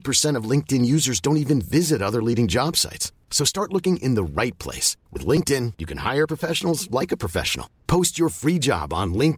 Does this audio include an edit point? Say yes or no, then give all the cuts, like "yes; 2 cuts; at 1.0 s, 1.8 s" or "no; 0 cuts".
no; 0 cuts